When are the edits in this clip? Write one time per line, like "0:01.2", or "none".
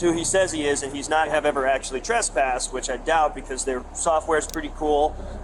0:01.3